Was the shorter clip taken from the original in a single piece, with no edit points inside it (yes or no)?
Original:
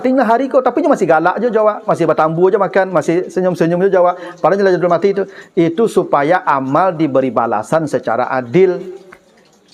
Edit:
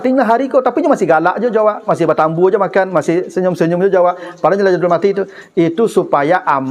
yes